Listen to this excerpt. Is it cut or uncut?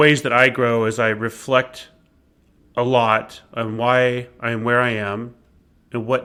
uncut